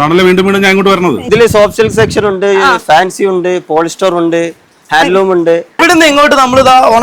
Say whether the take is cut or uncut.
cut